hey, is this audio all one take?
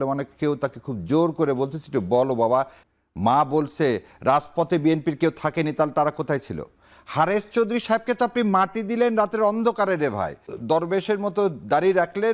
no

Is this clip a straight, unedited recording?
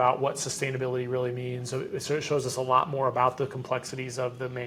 yes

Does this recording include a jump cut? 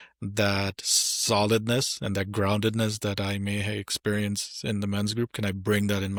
no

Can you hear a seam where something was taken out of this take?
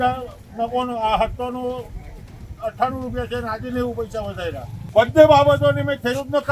yes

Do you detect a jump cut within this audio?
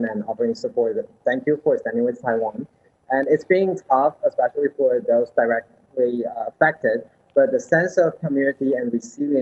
no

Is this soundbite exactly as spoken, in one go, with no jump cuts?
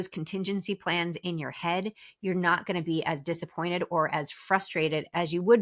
yes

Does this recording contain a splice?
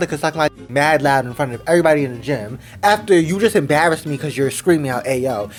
no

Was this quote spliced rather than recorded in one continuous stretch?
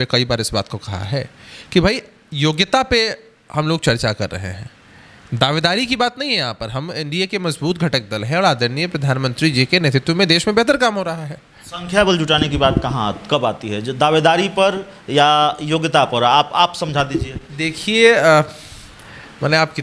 no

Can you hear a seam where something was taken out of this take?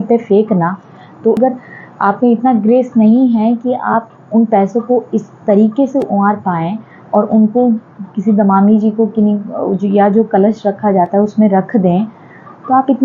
yes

